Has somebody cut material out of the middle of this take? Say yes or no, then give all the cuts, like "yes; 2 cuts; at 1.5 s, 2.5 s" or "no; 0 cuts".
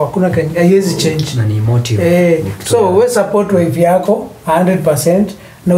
no; 0 cuts